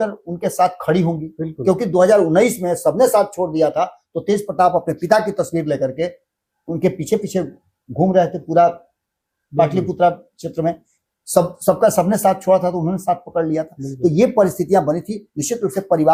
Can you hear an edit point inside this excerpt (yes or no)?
no